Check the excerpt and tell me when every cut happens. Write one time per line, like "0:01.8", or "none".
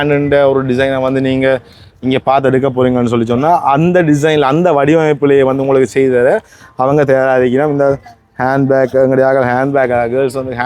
none